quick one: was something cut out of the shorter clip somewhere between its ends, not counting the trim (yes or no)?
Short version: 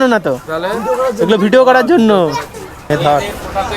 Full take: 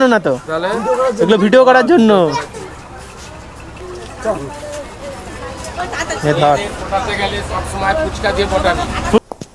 yes